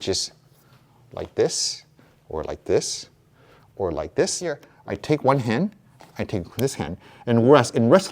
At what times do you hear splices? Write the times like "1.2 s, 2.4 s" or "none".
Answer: 4.7 s